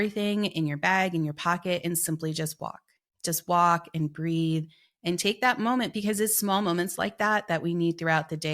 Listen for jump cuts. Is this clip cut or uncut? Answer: uncut